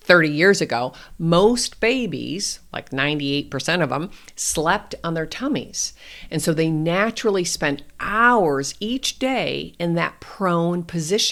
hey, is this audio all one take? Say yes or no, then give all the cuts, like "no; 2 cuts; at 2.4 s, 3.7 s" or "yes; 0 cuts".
yes; 0 cuts